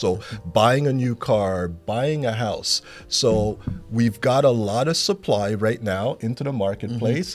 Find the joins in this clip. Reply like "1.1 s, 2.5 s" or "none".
1.8 s